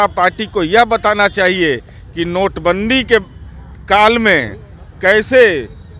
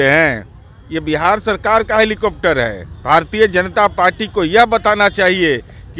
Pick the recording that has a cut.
second; 1 cut; at 2.9 s

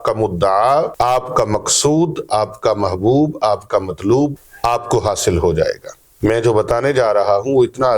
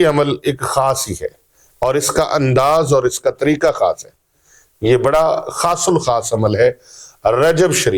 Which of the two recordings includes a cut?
first; 3 cuts; at 0.9 s, 4.5 s, 6.0 s

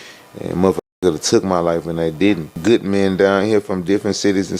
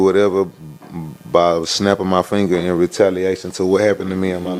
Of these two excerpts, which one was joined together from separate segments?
first; 1 cut; at 2.5 s

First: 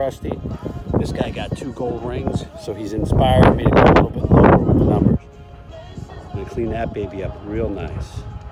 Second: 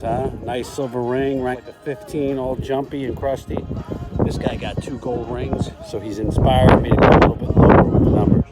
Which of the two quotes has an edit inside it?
second; 1 cut; at 1.6 s

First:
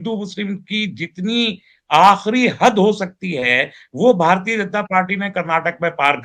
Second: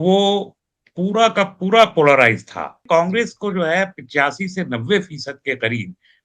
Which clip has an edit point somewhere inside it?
second; 1 cut; at 2.8 s

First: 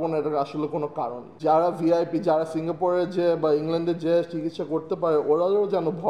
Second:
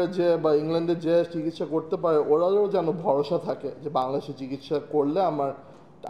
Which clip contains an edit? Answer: first; 1 cut; at 1.2 s

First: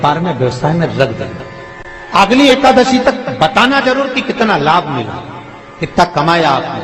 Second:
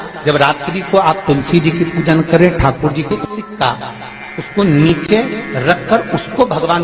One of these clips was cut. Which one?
second; 1 cut; at 3.1 s

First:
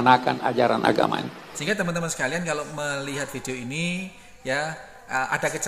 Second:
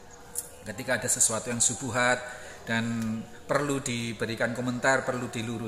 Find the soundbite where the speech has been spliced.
first; 1 cut; at 1.5 s

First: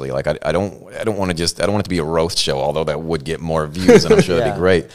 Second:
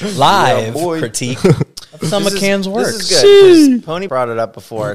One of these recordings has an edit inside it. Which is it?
second; 1 cut; at 4.0 s

